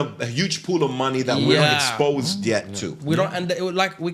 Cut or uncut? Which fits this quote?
uncut